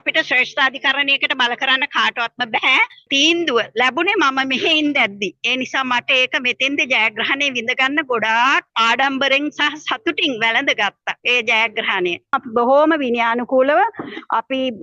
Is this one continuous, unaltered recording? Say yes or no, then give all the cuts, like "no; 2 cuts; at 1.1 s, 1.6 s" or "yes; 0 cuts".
no; 4 cuts; at 3.1 s, 8.7 s, 11.1 s, 12.4 s